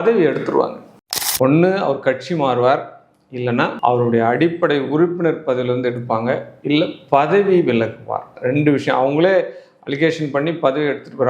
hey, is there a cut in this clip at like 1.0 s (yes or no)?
yes